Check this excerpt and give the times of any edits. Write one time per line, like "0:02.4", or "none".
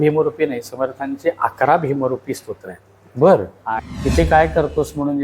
0:03.8